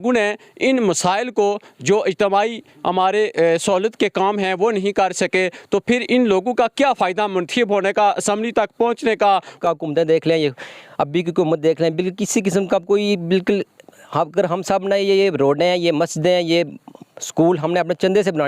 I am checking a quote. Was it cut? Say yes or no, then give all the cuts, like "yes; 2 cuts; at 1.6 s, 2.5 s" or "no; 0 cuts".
yes; 1 cut; at 9.6 s